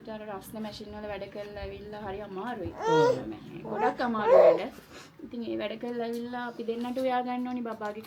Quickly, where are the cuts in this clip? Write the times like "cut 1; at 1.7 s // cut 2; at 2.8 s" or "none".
none